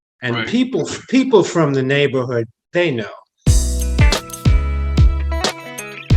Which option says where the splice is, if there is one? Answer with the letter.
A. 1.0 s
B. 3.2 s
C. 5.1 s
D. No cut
B